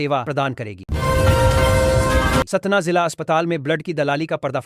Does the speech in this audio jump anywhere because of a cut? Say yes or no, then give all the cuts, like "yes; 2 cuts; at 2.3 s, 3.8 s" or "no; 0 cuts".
yes; 2 cuts; at 0.8 s, 2.5 s